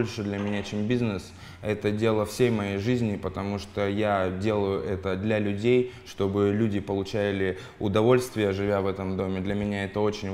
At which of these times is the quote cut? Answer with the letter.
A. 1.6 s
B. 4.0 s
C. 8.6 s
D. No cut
D